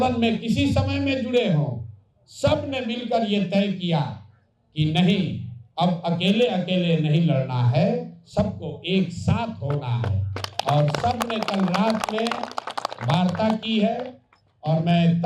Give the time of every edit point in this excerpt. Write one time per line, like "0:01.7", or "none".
none